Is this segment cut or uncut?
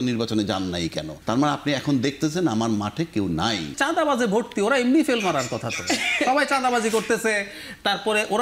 cut